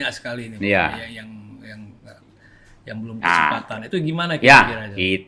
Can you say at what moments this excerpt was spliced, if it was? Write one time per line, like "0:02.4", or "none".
none